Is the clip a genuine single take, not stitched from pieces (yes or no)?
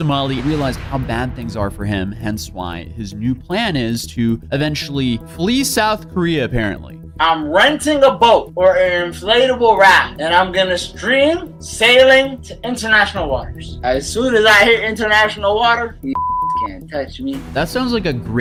yes